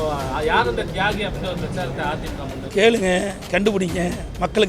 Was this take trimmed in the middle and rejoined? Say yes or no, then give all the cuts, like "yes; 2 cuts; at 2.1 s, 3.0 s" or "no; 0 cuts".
yes; 1 cut; at 2.6 s